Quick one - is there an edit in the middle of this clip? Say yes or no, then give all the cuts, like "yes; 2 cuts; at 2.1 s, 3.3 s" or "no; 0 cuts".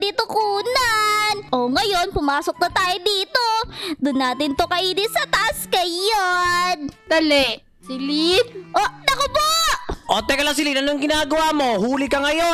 no; 0 cuts